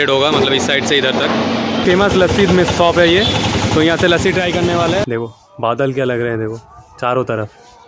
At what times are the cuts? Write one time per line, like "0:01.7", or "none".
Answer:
0:01.8
0:05.0